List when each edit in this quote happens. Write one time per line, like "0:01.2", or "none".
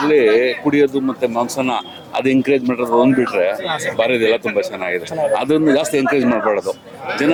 none

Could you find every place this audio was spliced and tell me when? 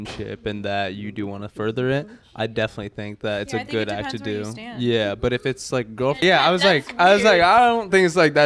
0:06.2

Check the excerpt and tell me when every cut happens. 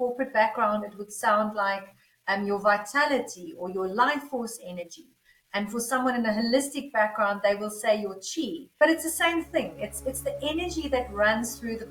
0:08.7

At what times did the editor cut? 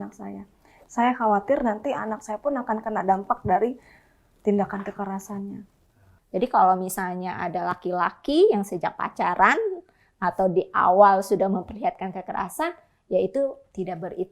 0:06.1

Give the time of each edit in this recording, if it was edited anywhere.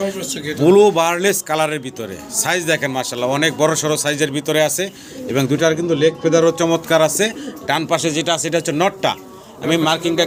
none

